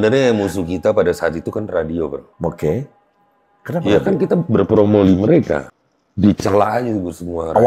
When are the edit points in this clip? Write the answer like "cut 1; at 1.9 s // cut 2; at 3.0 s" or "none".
cut 1; at 2.3 s // cut 2; at 5.7 s